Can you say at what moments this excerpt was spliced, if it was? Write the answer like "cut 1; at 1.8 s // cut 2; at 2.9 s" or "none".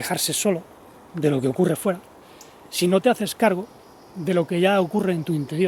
none